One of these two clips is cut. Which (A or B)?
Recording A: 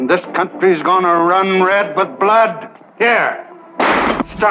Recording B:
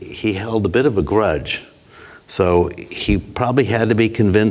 A